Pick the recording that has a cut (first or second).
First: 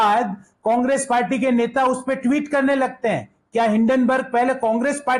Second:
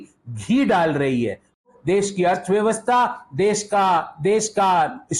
second